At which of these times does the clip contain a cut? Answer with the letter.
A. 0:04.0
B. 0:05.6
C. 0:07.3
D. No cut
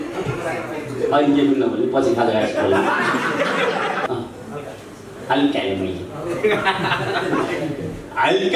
A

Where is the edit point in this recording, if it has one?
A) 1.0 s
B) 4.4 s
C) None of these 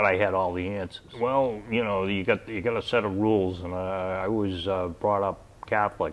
A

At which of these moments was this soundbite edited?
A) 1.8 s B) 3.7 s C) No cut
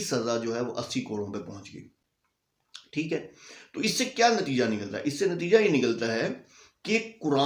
C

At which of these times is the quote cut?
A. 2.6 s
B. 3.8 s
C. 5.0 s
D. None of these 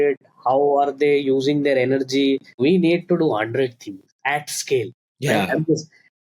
A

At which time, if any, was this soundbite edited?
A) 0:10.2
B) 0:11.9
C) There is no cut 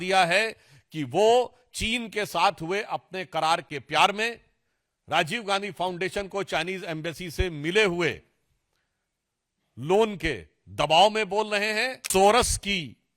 B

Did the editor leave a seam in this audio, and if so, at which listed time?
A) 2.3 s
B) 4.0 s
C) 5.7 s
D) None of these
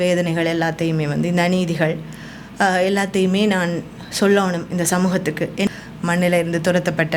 C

